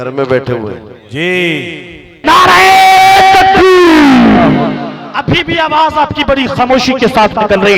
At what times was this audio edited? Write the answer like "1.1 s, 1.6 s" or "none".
2.2 s